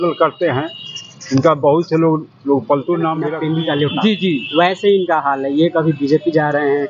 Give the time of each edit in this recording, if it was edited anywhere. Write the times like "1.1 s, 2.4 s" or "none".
3.3 s